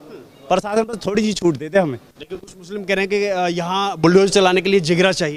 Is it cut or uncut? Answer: uncut